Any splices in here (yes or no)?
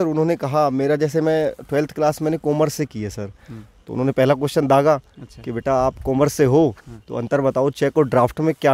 no